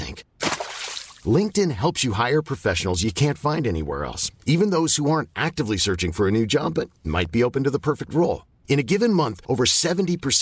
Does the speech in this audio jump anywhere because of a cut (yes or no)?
no